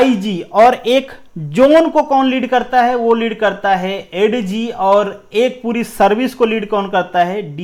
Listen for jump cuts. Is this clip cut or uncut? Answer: uncut